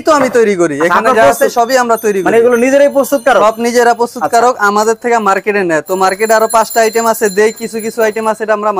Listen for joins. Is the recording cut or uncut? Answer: uncut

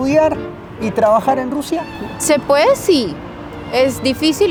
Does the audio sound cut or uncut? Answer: uncut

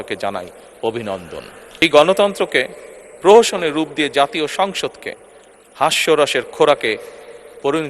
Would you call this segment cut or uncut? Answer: cut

